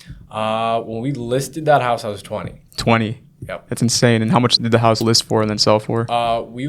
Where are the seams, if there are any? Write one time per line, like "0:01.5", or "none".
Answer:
0:05.0